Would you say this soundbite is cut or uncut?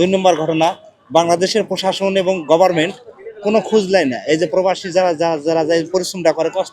uncut